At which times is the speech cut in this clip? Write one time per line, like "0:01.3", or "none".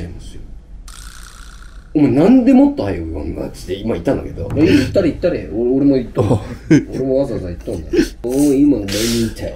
0:04.4
0:08.2